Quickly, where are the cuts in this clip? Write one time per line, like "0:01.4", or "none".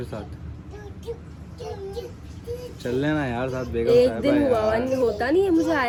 none